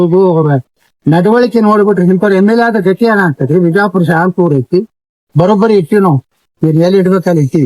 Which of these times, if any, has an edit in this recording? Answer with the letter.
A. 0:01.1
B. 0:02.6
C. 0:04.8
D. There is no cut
D